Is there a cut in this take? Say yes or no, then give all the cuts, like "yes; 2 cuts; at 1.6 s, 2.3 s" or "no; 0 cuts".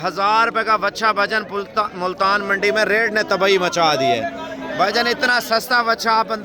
no; 0 cuts